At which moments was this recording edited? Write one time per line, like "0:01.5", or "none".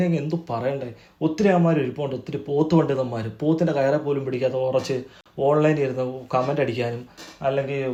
none